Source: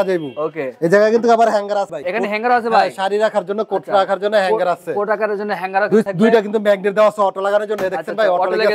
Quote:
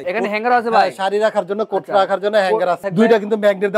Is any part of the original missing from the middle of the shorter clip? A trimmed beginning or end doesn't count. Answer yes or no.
yes